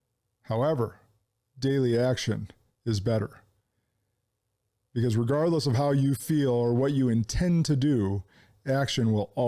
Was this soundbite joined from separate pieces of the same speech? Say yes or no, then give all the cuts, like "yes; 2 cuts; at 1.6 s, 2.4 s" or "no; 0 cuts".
no; 0 cuts